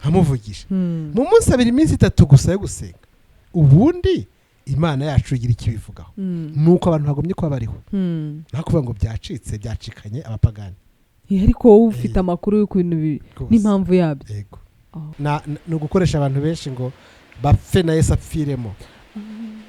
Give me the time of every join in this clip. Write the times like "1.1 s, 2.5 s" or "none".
15.0 s